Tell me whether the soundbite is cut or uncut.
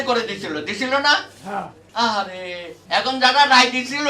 cut